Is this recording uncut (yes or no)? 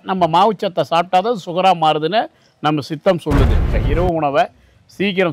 no